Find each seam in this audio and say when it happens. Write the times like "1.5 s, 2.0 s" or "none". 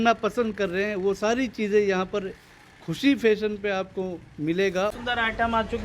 4.9 s